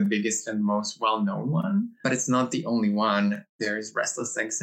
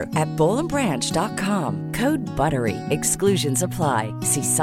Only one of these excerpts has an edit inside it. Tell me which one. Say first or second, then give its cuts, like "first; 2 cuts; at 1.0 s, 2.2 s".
first; 2 cuts; at 2.0 s, 3.6 s